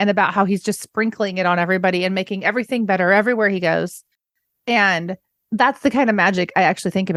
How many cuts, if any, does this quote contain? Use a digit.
0